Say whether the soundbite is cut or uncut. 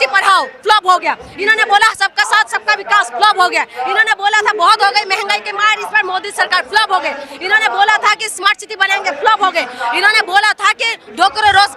uncut